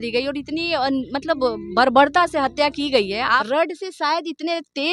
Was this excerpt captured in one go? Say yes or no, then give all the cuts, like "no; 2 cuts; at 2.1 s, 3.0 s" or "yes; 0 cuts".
no; 1 cut; at 3.4 s